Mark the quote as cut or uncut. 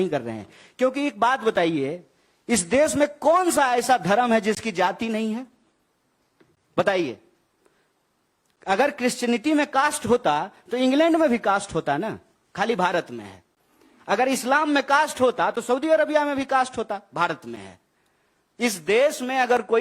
uncut